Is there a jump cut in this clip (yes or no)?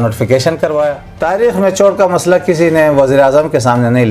yes